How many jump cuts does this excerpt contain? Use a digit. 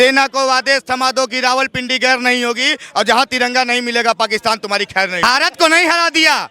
1